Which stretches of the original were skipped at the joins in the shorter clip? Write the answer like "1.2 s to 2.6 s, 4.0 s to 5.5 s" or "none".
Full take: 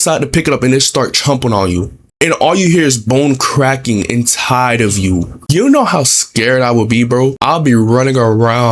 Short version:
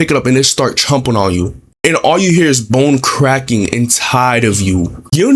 none